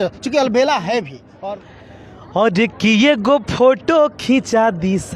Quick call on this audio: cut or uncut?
cut